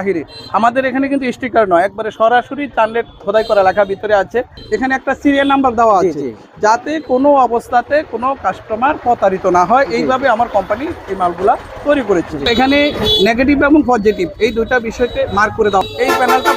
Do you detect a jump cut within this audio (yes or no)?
yes